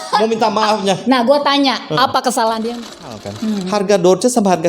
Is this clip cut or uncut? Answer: cut